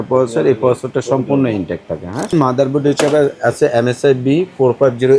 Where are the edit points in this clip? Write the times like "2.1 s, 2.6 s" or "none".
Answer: 2.3 s